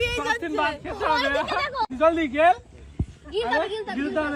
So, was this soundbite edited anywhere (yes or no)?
yes